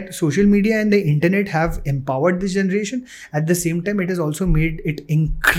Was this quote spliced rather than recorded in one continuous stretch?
no; 0 cuts

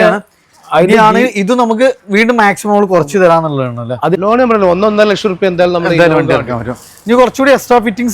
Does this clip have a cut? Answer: yes; 1 cut; at 4.2 s

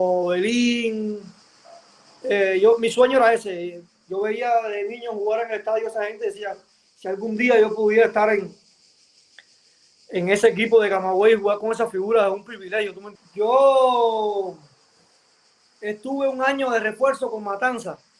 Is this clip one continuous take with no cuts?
no; 1 cut; at 13.0 s

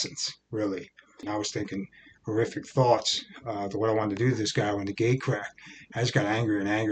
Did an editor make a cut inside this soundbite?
yes; 1 cut; at 1.2 s

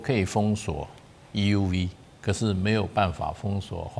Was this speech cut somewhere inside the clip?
no; 0 cuts

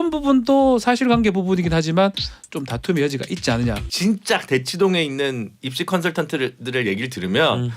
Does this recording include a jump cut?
yes; 1 cut; at 3.8 s

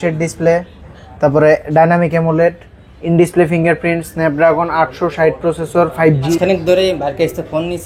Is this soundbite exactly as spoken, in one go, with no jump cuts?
no; 1 cut; at 6.3 s

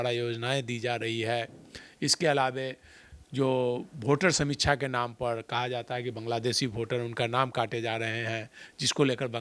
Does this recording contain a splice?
no; 0 cuts

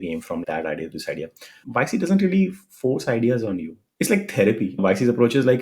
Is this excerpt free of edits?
no; 2 cuts; at 1.6 s, 4.7 s

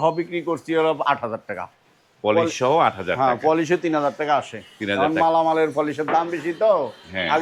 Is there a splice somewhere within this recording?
no; 0 cuts

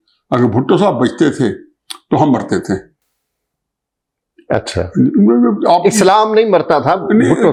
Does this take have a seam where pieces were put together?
no; 0 cuts

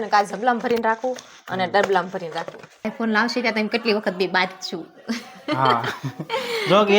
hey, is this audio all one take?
no; 1 cut; at 2.9 s

